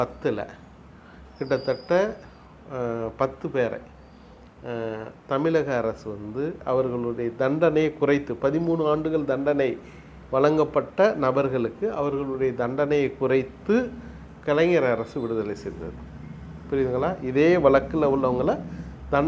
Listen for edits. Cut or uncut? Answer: uncut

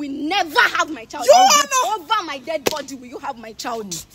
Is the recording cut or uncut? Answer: uncut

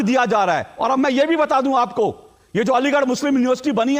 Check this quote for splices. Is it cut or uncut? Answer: uncut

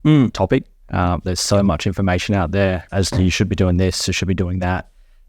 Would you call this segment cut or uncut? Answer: cut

